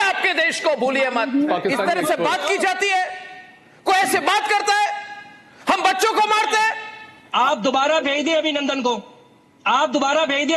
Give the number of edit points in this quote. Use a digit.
2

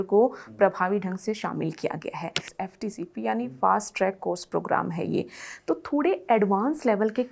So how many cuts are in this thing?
1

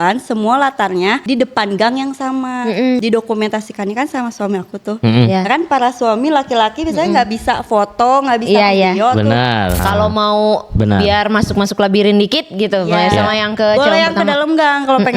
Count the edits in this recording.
3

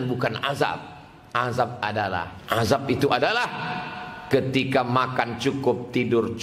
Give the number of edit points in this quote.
1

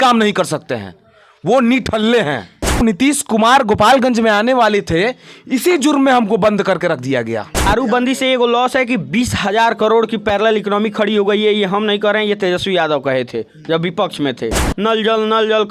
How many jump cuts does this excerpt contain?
3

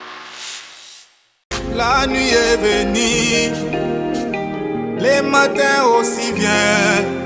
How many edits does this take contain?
1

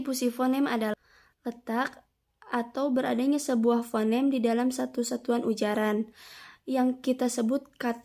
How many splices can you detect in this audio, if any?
1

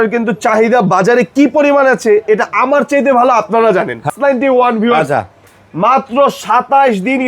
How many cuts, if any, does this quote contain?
1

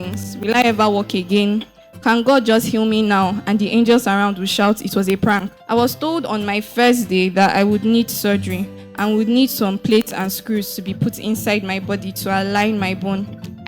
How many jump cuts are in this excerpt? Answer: 1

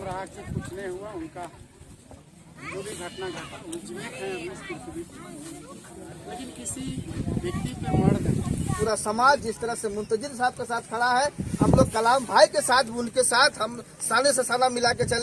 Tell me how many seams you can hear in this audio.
1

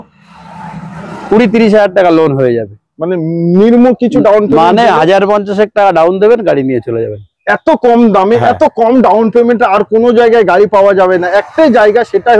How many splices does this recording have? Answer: 0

